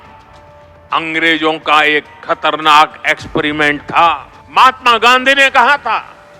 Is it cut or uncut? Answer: cut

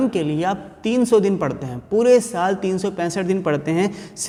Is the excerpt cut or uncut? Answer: uncut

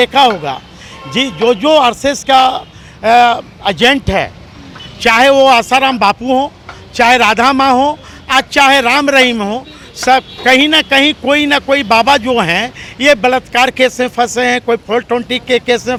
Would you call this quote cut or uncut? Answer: uncut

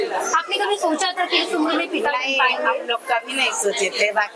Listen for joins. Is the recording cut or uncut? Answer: uncut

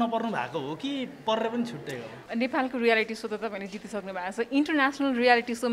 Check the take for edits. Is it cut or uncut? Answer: cut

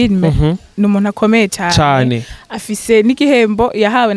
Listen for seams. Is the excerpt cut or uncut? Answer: uncut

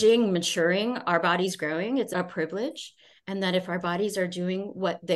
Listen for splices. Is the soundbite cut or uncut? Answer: cut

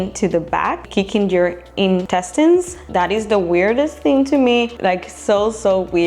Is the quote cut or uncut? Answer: cut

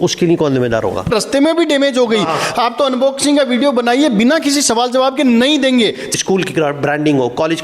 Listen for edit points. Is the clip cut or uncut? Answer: cut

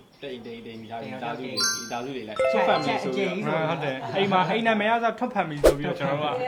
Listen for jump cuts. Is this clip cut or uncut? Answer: uncut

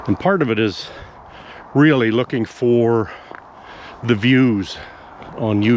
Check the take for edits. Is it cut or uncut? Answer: uncut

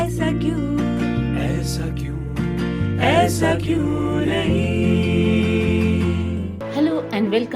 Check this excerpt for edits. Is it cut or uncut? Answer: cut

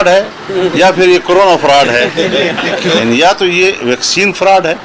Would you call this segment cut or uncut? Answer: cut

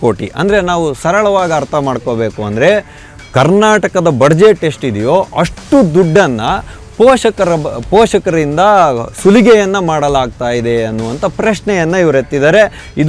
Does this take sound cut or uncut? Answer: uncut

